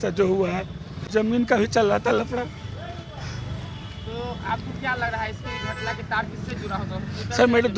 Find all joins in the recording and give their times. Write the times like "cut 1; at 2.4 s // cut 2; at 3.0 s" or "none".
cut 1; at 1.0 s